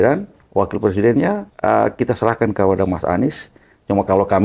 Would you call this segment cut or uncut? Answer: cut